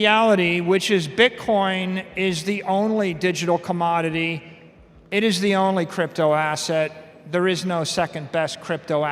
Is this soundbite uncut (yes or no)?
yes